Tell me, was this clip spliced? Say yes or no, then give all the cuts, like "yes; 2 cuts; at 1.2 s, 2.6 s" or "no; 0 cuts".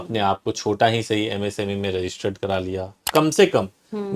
yes; 1 cut; at 3.1 s